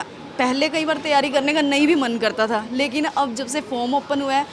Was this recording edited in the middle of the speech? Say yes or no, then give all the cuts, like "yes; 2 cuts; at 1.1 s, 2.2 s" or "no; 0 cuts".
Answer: no; 0 cuts